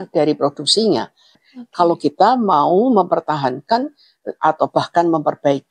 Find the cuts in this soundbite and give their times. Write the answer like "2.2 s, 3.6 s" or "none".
1.4 s